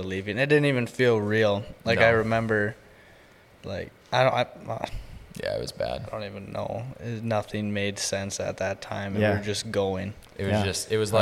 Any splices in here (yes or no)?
no